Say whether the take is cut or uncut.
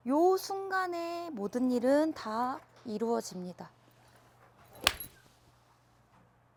uncut